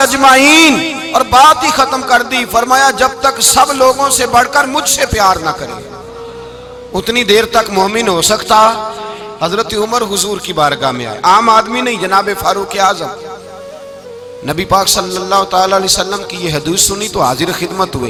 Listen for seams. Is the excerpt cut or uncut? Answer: uncut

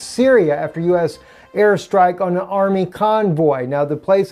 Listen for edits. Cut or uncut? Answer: uncut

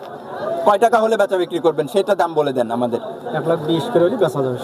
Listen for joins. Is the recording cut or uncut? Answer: uncut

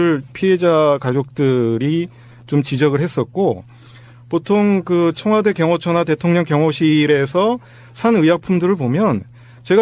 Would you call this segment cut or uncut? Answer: uncut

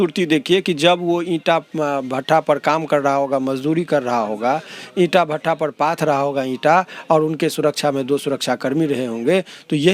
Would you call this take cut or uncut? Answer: uncut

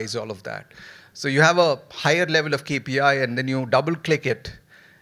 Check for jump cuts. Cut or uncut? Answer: uncut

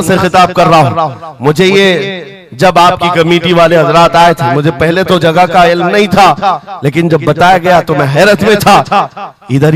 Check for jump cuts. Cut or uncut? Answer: uncut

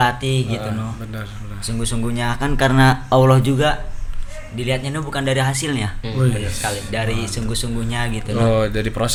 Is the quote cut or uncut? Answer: uncut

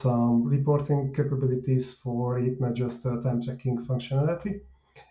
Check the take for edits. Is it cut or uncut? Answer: uncut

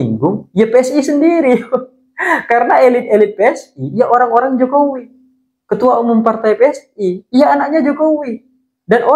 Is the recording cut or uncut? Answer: uncut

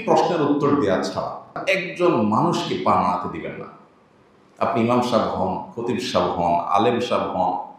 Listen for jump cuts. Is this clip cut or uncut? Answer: cut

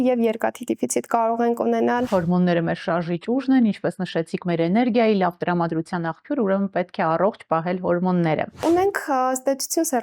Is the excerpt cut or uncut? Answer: cut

